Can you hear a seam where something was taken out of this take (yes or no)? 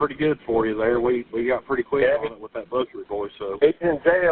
no